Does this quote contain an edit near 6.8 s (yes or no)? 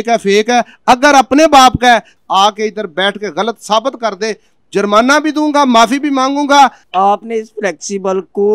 yes